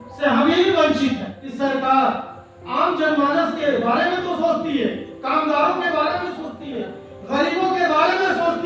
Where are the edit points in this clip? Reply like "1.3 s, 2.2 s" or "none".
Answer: 1.4 s